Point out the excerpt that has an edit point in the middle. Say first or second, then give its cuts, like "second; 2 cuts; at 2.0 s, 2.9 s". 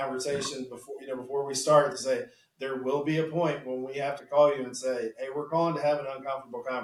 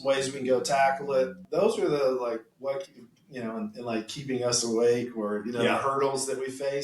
second; 2 cuts; at 1.4 s, 2.5 s